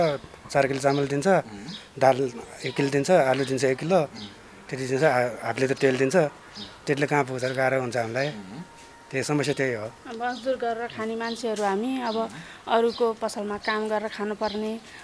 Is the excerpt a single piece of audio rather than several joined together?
yes; 0 cuts

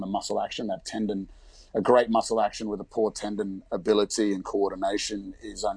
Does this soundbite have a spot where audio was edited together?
no; 0 cuts

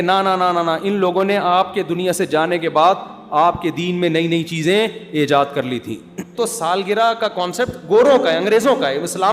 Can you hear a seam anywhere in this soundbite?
yes; 1 cut; at 6.3 s

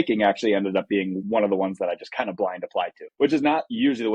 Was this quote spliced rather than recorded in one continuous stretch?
yes; 2 cuts; at 1.2 s, 3.0 s

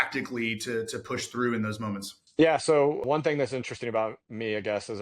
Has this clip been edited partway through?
yes; 2 cuts; at 2.2 s, 3.0 s

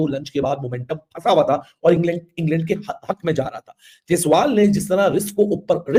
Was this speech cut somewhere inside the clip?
no; 0 cuts

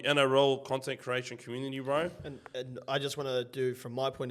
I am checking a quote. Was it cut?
no; 0 cuts

